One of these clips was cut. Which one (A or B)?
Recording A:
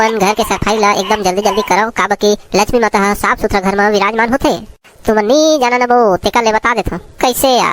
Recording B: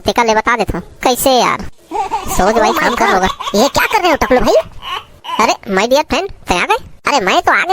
B